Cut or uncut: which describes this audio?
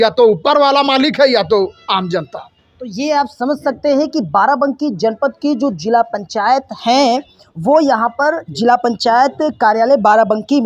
uncut